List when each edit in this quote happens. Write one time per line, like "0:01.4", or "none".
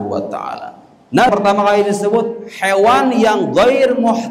0:01.3